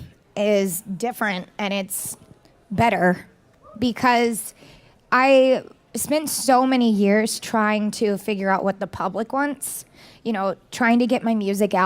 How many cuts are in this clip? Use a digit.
1